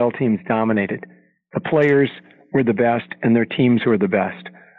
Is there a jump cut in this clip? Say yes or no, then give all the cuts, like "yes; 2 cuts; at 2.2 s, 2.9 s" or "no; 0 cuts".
no; 0 cuts